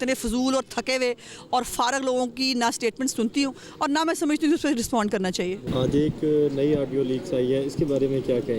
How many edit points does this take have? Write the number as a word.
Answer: zero